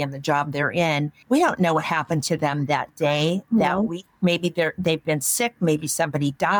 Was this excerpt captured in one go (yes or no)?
no